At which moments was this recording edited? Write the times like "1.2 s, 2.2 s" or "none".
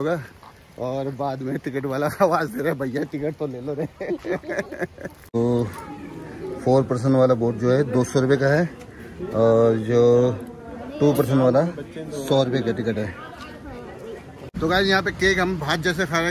5.3 s, 14.5 s